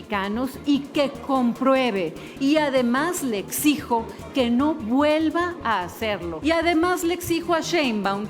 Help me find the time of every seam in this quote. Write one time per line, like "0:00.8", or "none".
0:06.3